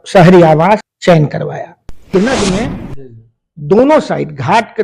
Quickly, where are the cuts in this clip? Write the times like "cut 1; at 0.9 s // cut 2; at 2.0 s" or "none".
cut 1; at 0.9 s // cut 2; at 2.1 s